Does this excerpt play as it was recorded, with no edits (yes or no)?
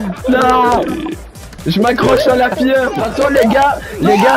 no